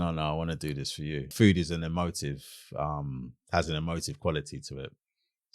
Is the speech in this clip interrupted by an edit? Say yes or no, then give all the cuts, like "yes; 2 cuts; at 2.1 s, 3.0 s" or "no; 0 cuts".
yes; 1 cut; at 1.3 s